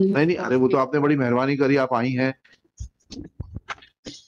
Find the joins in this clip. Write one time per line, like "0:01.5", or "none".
none